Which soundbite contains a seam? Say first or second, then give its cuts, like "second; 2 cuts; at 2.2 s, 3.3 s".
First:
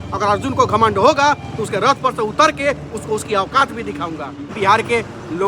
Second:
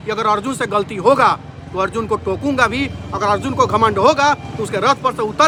first; 1 cut; at 4.5 s